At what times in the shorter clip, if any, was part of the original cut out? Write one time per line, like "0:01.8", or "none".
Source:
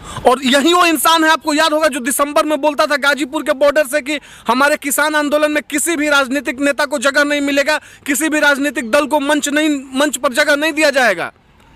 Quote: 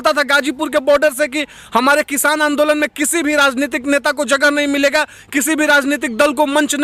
none

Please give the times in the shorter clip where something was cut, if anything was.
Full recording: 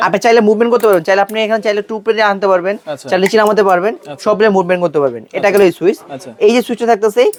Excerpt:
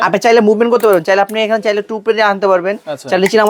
none

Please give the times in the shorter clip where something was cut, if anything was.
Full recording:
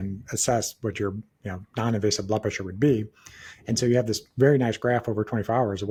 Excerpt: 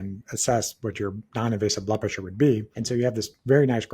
0:01.2
0:02.7

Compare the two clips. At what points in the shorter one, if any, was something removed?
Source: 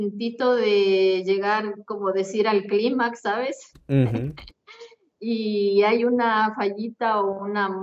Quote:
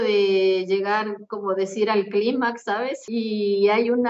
0:03.0

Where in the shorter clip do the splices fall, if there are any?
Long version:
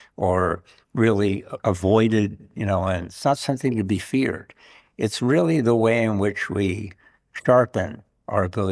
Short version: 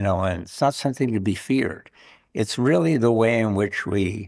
none

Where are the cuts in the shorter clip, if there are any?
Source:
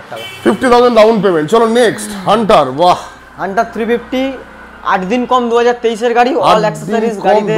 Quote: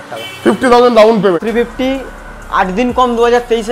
0:01.4

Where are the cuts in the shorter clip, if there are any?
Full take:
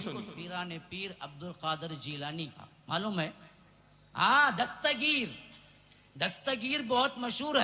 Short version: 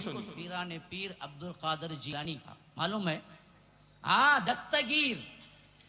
0:02.2

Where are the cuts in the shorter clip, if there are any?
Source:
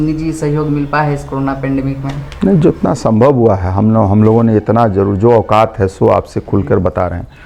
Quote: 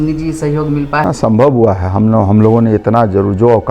0:01.0

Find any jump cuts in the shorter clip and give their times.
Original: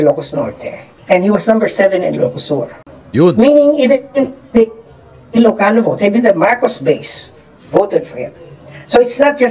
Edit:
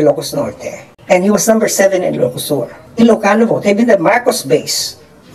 0:02.8

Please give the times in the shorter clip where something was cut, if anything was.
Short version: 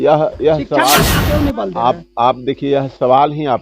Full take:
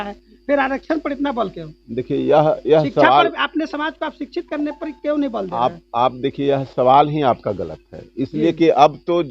0:01.2

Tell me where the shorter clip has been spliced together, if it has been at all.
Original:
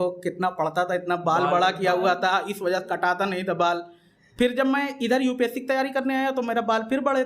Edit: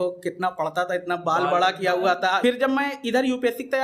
0:02.4

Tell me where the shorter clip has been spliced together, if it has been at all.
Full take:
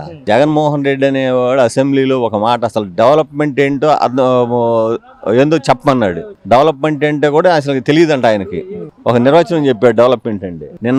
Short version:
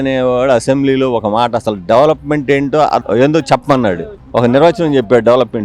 0:03.0
0:04.1

